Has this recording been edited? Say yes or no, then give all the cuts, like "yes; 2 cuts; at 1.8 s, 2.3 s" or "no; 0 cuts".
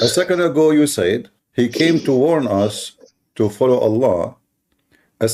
yes; 1 cut; at 1.4 s